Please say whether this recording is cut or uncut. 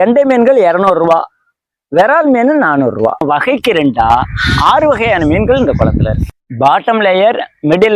cut